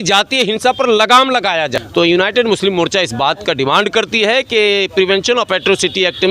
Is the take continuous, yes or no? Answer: no